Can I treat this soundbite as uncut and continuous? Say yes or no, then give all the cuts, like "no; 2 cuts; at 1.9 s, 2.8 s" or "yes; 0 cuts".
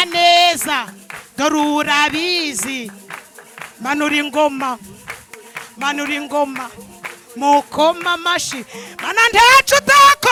yes; 0 cuts